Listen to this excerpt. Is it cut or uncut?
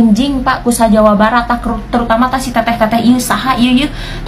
uncut